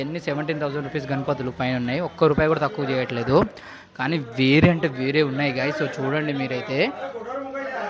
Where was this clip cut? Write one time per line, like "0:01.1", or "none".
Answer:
none